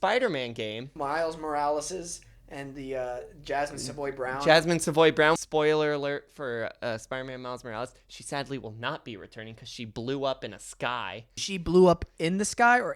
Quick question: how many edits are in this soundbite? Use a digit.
3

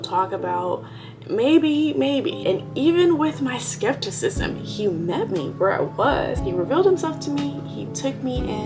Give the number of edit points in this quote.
1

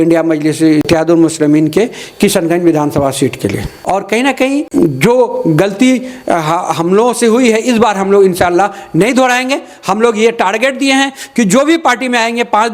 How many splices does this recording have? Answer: 3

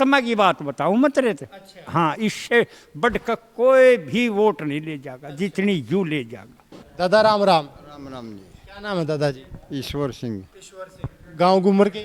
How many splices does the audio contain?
0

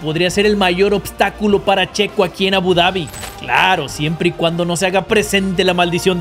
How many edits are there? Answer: 1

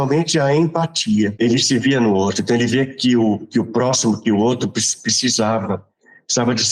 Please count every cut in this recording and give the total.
1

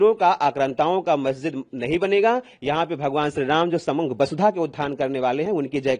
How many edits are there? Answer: 0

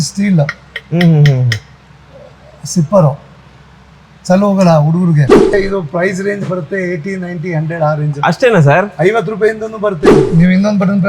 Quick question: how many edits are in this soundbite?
2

